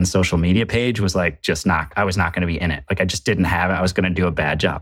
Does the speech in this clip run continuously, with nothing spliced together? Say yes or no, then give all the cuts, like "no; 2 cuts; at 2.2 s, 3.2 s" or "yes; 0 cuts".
yes; 0 cuts